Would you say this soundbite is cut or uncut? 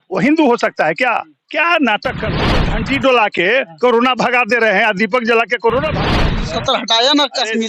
cut